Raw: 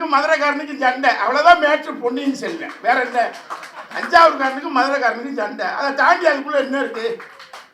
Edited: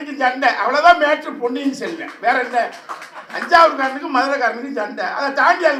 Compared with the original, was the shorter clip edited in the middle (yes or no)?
no